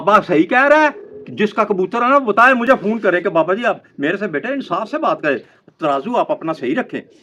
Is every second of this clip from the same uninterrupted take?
yes; 0 cuts

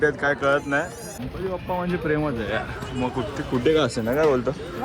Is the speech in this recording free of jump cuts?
no; 1 cut; at 1.2 s

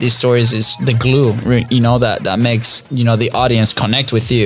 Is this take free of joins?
yes; 0 cuts

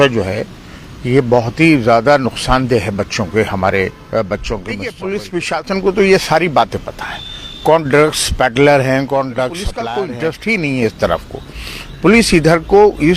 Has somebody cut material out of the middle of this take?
yes; 2 cuts; at 4.9 s, 9.7 s

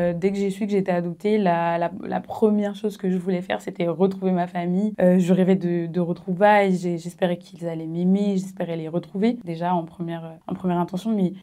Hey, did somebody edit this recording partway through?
no; 0 cuts

